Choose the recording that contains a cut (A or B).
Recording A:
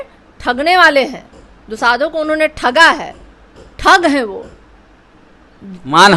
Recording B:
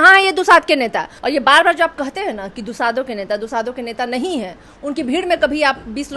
B